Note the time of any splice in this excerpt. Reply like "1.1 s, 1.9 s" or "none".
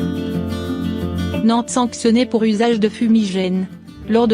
1.4 s